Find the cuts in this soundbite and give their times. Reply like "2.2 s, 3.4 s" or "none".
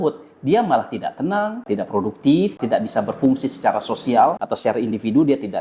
1.6 s, 2.6 s, 4.5 s